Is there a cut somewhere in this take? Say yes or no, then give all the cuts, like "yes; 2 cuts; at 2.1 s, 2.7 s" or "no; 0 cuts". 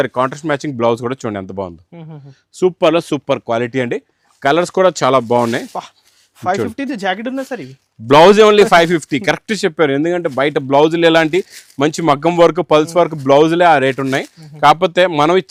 no; 0 cuts